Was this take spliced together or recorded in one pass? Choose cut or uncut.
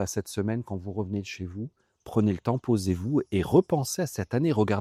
uncut